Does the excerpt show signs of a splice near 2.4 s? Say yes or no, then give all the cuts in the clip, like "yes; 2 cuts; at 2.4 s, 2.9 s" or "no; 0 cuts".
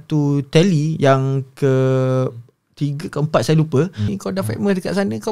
no; 1 cut; at 4.1 s